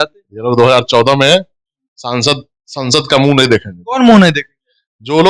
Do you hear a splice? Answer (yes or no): no